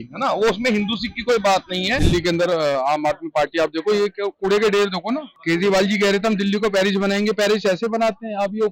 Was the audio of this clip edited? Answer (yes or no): yes